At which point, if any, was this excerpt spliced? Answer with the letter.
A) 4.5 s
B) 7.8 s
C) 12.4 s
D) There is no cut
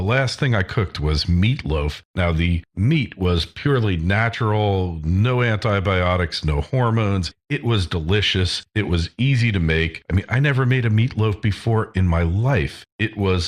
B